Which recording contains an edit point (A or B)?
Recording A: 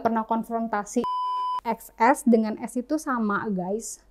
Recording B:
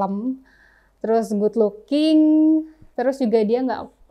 A